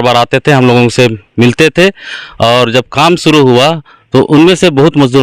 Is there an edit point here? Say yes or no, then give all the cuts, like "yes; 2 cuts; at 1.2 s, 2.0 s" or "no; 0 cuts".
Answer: no; 0 cuts